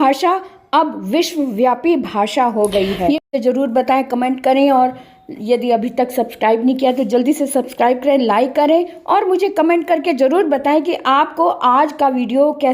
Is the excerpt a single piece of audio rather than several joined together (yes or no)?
no